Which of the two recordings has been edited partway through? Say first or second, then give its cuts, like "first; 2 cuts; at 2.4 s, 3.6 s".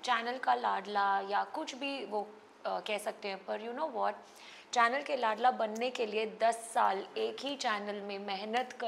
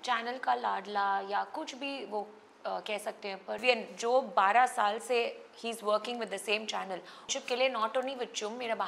second; 2 cuts; at 3.6 s, 7.3 s